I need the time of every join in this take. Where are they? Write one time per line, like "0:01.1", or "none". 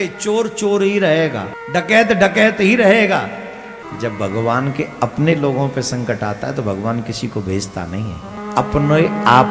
0:01.5
0:03.8
0:08.4